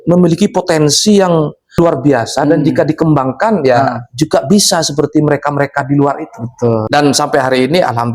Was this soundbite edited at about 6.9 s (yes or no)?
yes